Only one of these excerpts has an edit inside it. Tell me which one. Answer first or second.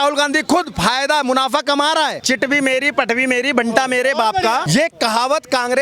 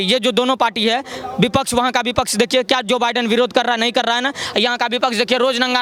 first